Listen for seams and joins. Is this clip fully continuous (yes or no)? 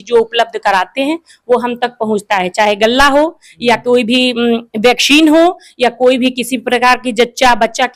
yes